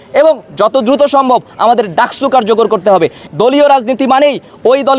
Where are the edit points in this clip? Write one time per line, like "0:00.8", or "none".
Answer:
0:03.2